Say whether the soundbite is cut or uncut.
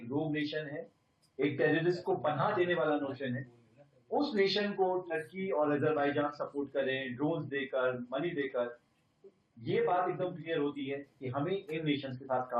uncut